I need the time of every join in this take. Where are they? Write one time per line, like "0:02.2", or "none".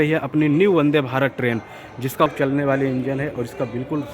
0:02.3